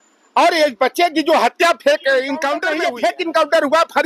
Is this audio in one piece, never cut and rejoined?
no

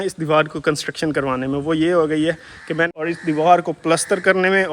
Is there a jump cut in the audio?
yes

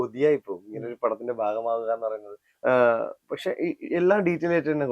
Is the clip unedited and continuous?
no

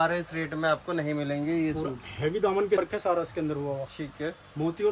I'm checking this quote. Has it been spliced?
yes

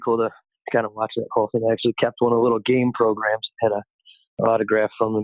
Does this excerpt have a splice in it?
yes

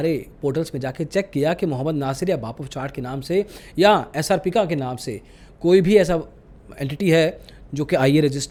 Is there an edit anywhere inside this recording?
no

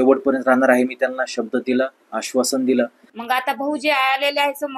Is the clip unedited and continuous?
no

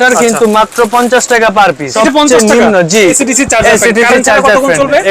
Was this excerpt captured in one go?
no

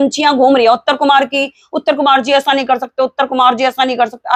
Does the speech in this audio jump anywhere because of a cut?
no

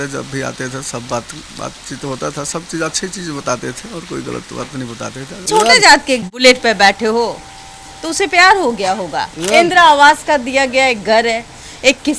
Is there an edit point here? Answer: yes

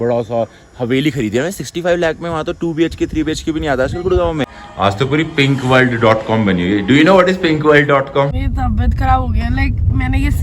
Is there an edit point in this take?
yes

